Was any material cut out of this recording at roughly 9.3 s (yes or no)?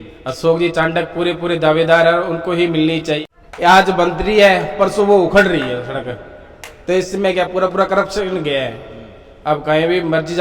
no